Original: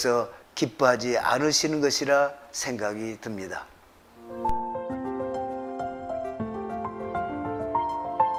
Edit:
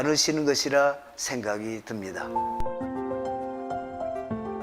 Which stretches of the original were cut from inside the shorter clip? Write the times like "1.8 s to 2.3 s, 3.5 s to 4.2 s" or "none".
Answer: 3.6 s to 4.3 s